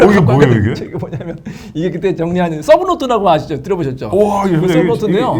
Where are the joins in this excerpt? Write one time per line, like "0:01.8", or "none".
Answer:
none